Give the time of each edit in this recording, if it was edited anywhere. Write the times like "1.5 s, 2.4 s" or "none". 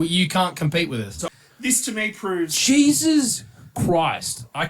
1.2 s